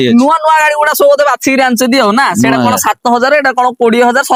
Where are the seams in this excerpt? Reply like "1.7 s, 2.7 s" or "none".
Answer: none